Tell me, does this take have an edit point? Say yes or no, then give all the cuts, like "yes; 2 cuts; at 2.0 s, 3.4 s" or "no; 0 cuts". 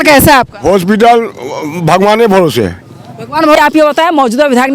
yes; 1 cut; at 3.6 s